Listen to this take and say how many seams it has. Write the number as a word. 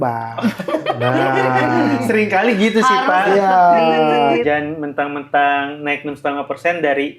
one